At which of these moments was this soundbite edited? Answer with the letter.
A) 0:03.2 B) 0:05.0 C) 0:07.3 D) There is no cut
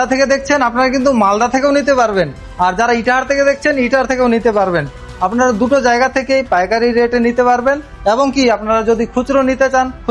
D